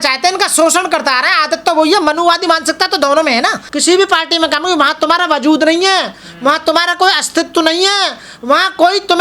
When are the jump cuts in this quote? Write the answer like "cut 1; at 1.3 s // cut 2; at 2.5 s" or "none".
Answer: cut 1; at 3.7 s